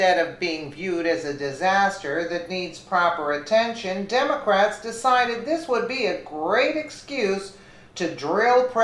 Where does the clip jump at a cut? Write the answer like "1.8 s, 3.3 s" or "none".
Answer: 3.2 s